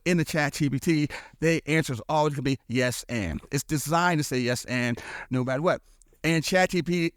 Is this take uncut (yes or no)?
yes